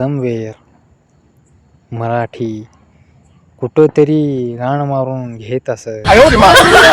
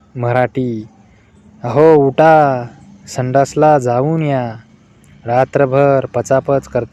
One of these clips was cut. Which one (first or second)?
first